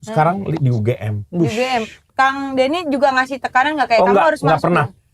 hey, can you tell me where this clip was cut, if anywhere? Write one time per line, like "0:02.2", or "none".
0:02.0